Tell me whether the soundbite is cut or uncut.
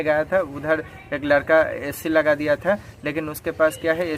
uncut